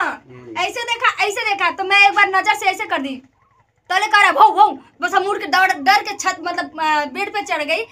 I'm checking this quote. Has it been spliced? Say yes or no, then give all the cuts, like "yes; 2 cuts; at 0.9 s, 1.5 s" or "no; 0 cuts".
no; 0 cuts